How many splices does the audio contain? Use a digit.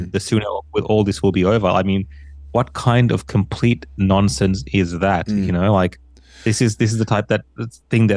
0